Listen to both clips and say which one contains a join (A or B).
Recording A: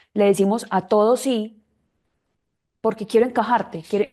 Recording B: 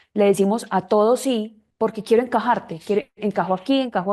B